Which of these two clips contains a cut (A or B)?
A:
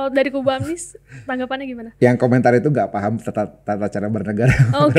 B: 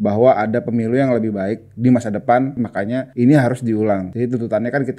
B